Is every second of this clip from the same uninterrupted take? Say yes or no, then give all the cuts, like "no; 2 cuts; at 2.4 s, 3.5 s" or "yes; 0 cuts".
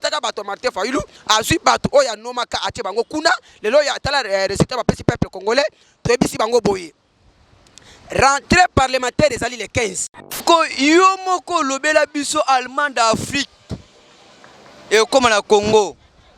no; 1 cut; at 10.4 s